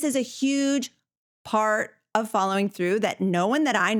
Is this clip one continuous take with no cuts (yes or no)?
yes